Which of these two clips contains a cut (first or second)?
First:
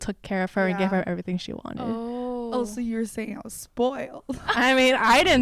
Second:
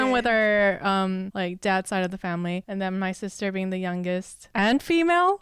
second